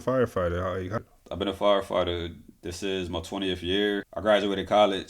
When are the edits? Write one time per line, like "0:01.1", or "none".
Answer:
0:00.9
0:04.1